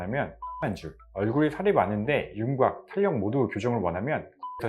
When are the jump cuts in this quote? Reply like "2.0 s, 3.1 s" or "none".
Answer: 1.0 s